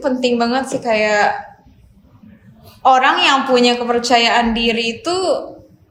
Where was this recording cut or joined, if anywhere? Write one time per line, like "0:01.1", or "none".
none